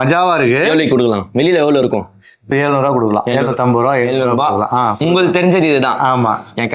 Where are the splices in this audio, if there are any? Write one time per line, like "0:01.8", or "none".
0:02.5